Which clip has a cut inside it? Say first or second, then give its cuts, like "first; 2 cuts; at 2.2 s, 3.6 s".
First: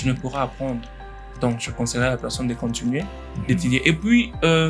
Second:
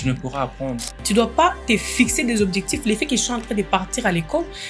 second; 1 cut; at 1.0 s